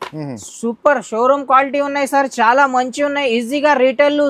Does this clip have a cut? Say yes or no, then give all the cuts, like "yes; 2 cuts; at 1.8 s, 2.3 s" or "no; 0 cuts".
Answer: no; 0 cuts